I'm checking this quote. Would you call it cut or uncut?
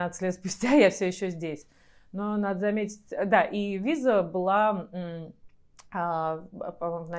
uncut